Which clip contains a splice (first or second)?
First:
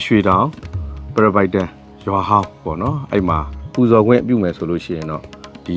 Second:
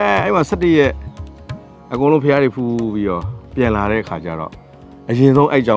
first